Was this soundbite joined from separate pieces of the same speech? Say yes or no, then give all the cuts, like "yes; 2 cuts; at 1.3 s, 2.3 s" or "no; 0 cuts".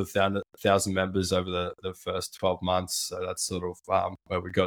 no; 0 cuts